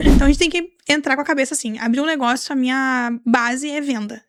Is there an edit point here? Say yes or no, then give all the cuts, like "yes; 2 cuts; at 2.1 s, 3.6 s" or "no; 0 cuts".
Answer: no; 0 cuts